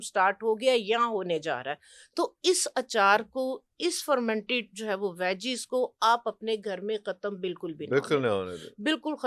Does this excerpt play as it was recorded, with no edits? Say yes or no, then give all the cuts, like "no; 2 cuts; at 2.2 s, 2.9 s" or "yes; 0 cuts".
yes; 0 cuts